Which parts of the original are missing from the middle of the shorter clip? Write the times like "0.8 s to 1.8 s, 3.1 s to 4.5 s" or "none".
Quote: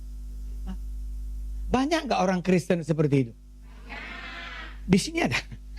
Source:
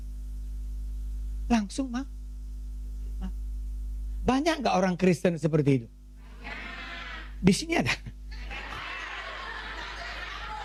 none